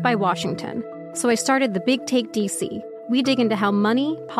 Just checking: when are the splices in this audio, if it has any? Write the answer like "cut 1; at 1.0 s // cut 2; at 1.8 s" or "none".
cut 1; at 1.0 s // cut 2; at 2.9 s